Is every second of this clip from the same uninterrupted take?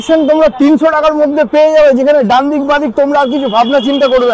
yes; 0 cuts

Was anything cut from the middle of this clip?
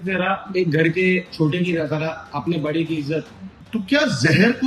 yes; 1 cut; at 3.5 s

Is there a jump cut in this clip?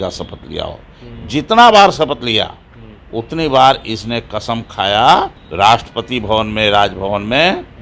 yes; 1 cut; at 5.4 s

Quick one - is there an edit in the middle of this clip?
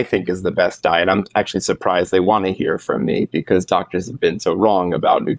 no; 0 cuts

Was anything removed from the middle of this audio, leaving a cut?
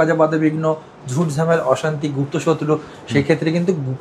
no; 0 cuts

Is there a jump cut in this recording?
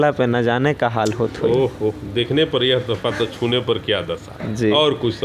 no; 0 cuts

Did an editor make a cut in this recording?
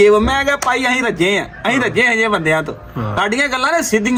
no; 0 cuts

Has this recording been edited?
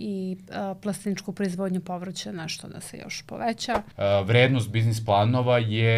yes; 1 cut; at 3.9 s

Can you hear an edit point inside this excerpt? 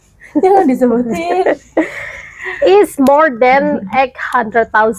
no; 0 cuts

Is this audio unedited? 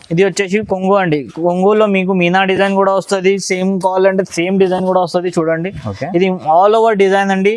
yes; 0 cuts

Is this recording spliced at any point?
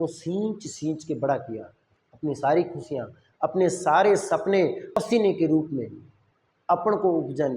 yes; 1 cut; at 4.9 s

